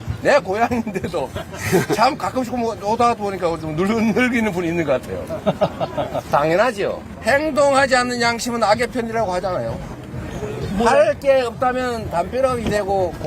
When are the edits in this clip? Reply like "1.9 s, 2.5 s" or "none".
7.1 s